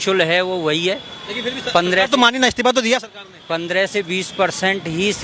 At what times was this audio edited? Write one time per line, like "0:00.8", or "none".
none